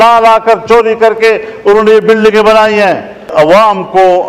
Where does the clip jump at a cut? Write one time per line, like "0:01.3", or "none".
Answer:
0:03.2